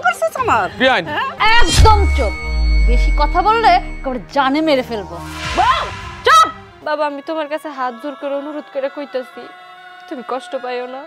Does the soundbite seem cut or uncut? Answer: cut